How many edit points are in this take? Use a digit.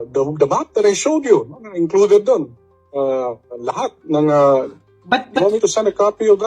0